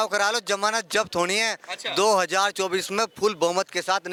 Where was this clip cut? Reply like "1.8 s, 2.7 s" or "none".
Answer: none